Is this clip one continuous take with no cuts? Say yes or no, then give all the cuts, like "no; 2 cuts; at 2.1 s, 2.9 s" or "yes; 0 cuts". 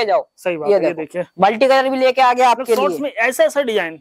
yes; 0 cuts